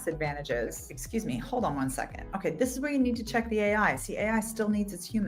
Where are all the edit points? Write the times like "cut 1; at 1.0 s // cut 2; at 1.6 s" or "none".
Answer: cut 1; at 0.9 s